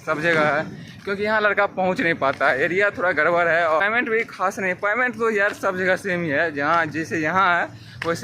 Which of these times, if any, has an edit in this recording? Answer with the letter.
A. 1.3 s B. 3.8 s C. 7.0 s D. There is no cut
B